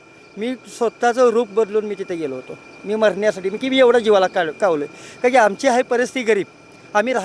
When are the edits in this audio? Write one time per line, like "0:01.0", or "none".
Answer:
none